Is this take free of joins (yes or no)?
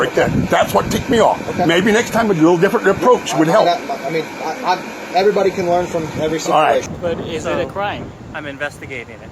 no